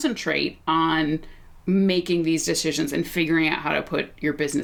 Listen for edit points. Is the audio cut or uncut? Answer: uncut